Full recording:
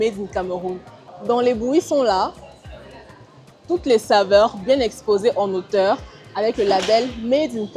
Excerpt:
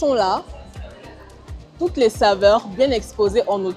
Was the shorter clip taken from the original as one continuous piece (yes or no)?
yes